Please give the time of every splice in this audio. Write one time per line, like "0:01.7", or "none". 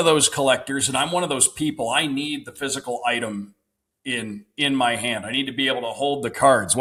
none